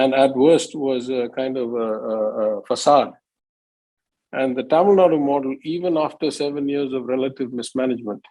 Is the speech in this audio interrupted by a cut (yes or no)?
no